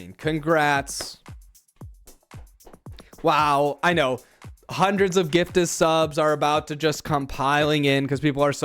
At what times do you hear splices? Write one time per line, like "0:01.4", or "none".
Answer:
none

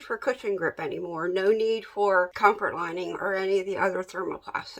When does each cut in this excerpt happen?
0:02.3

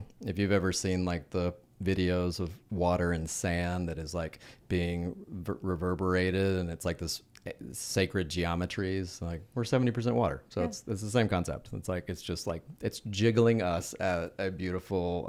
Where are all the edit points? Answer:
none

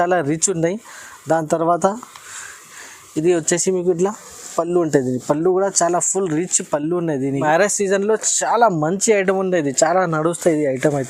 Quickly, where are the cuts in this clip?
0:07.4

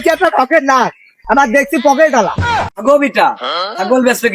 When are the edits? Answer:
0:02.7

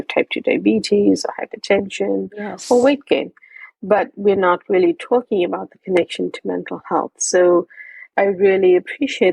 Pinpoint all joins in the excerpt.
0:08.1

